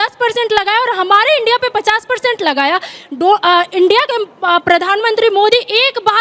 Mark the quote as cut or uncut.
uncut